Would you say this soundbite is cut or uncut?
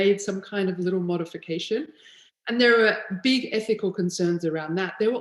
uncut